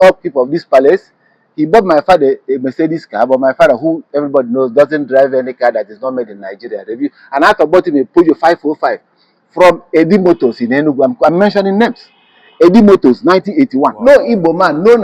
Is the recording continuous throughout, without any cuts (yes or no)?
no